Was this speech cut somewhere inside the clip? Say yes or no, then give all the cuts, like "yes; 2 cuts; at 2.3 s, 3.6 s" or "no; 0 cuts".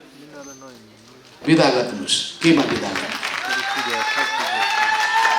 no; 0 cuts